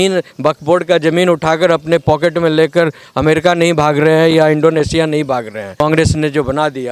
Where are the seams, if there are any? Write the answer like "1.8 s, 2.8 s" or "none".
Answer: 5.6 s